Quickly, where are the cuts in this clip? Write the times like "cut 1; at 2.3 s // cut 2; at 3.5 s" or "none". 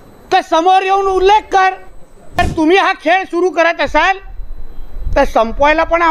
cut 1; at 2.4 s